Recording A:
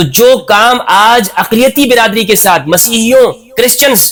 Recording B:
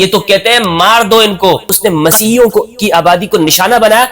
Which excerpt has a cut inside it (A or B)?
B